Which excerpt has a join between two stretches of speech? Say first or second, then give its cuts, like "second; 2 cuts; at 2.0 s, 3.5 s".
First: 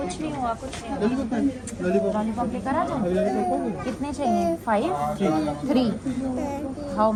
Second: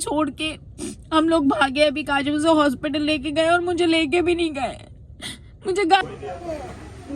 second; 1 cut; at 6.0 s